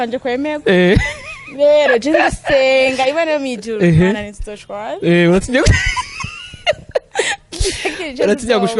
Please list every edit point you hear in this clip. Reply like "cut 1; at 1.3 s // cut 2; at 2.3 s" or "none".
none